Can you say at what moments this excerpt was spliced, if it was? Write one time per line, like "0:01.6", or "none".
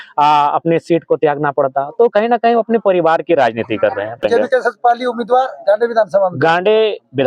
0:04.2